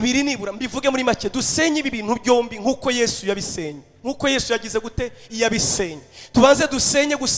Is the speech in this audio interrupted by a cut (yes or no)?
no